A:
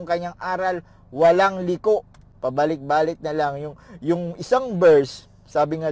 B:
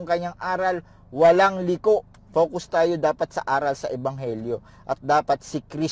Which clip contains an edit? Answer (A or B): B